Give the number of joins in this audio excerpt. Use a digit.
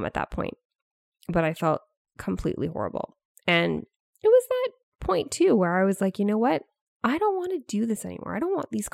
0